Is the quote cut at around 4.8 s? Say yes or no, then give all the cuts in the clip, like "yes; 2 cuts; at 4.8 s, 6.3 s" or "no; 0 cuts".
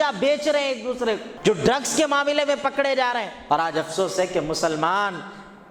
no; 2 cuts; at 1.3 s, 3.3 s